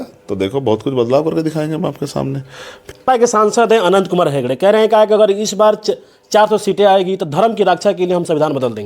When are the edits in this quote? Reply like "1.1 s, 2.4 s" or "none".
2.8 s